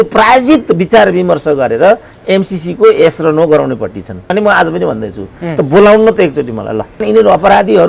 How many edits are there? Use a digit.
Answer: 2